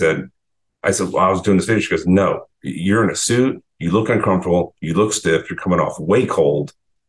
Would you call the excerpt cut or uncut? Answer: uncut